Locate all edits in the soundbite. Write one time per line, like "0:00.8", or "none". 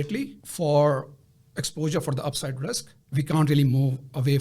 0:02.9